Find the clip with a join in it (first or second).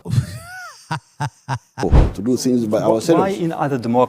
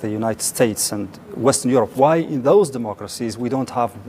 first